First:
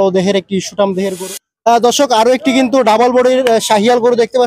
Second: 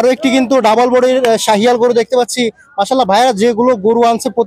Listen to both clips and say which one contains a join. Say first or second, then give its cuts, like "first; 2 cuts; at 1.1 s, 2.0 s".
first; 1 cut; at 1.1 s